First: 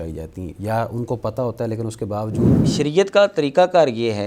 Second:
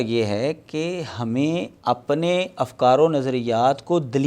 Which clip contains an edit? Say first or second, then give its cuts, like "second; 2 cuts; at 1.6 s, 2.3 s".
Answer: first; 1 cut; at 2.6 s